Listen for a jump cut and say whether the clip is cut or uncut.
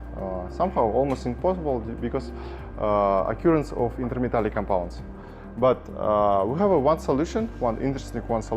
uncut